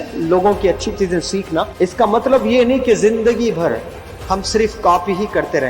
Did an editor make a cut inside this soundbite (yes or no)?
yes